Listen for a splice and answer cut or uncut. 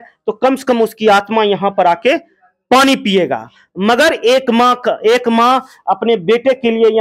uncut